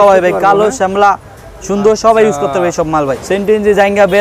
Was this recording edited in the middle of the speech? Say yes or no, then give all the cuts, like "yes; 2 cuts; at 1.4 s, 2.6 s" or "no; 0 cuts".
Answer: yes; 1 cut; at 3.2 s